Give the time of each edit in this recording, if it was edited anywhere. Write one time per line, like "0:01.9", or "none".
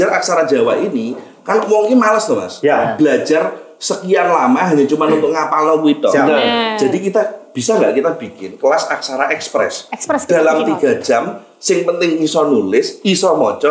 none